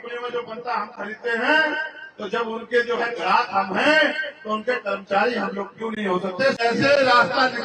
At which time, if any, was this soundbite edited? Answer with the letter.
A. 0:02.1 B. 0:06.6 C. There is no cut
B